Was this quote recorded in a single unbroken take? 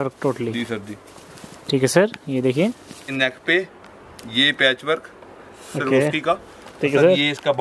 no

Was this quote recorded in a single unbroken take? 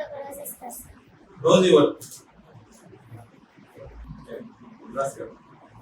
yes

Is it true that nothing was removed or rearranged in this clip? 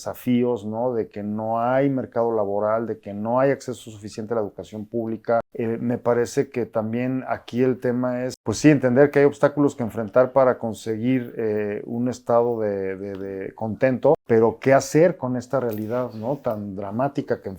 no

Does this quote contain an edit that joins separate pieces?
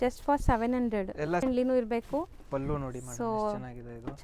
yes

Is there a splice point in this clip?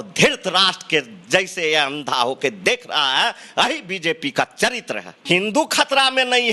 yes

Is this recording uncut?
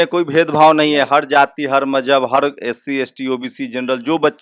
yes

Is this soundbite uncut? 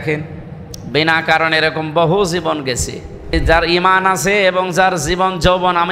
no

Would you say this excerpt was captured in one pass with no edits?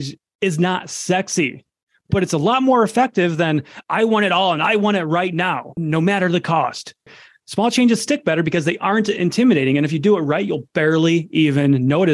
no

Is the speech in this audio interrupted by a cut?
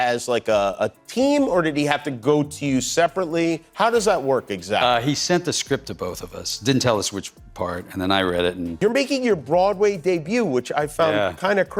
yes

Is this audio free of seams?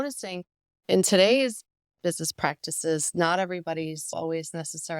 no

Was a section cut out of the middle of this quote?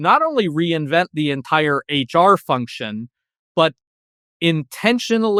no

